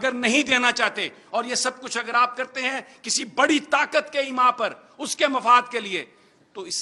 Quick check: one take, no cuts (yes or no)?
yes